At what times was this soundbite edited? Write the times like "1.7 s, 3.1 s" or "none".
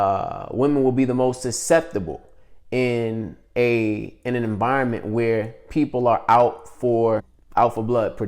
7.4 s